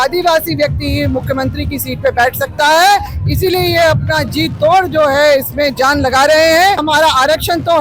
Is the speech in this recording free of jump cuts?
no; 1 cut; at 6.8 s

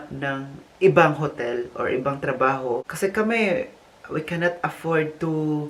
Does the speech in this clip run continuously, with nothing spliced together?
no; 1 cut; at 2.9 s

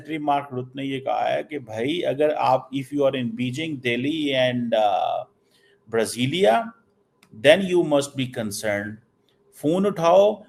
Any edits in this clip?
no; 0 cuts

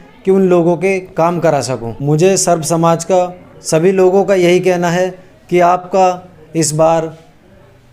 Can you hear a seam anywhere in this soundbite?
yes; 2 cuts; at 1.9 s, 3.5 s

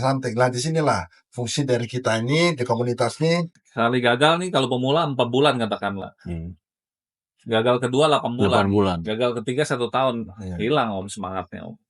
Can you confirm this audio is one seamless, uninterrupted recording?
no; 1 cut; at 3.6 s

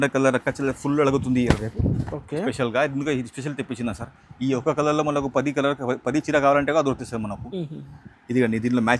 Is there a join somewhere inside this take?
no; 0 cuts

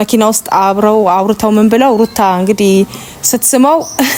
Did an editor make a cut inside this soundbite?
no; 0 cuts

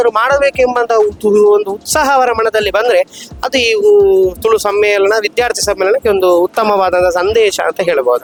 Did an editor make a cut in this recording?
no; 0 cuts

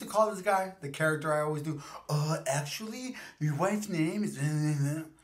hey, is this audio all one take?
yes; 0 cuts

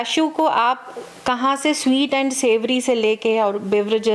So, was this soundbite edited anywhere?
no; 0 cuts

